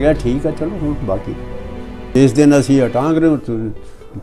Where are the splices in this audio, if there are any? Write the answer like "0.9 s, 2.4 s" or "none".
2.1 s